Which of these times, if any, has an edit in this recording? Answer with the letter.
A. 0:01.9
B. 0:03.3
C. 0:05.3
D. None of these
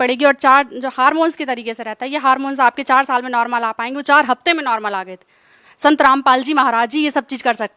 D